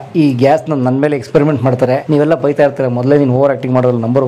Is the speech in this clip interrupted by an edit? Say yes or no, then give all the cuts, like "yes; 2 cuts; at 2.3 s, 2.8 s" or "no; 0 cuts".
yes; 1 cut; at 2.0 s